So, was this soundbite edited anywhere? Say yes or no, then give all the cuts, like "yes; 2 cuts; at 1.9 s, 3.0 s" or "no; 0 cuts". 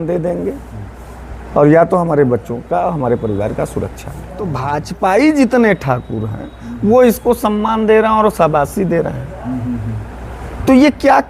yes; 1 cut; at 4.6 s